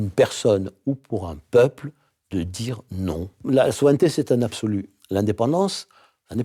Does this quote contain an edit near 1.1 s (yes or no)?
no